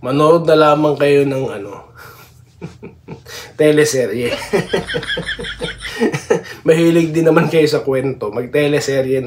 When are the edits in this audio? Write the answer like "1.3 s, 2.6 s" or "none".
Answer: none